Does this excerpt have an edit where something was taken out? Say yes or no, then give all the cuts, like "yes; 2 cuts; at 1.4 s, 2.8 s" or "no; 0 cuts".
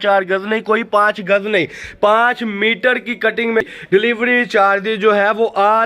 yes; 1 cut; at 3.6 s